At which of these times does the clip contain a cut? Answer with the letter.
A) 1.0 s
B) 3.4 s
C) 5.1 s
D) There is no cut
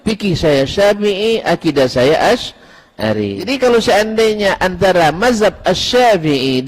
B